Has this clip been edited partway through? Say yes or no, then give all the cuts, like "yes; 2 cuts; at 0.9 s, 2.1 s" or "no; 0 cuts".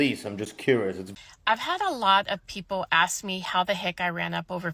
yes; 1 cut; at 1.1 s